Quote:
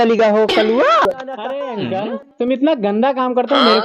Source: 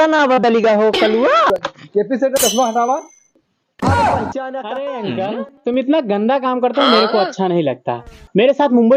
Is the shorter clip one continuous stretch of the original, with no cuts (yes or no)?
no